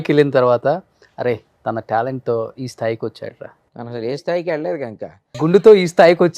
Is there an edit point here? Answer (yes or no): yes